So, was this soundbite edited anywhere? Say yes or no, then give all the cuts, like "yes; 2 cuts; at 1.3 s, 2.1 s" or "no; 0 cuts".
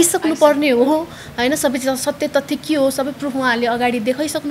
no; 0 cuts